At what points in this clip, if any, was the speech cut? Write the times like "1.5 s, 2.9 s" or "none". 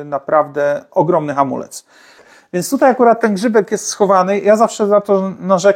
2.3 s